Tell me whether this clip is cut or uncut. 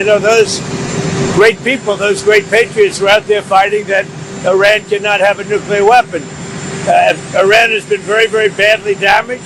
uncut